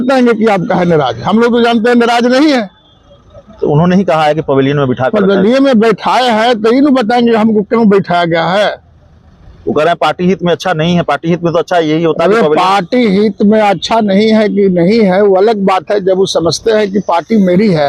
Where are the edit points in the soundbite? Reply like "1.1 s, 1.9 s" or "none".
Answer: none